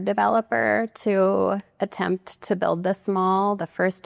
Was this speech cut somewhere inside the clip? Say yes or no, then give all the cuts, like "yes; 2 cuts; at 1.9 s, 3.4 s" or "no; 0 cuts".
no; 0 cuts